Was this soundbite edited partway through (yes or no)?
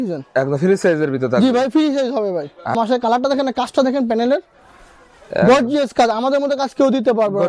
yes